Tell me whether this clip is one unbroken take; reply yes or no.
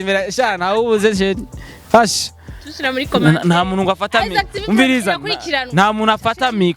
yes